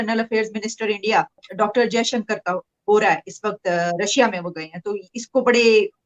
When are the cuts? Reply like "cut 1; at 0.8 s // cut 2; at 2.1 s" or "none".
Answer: none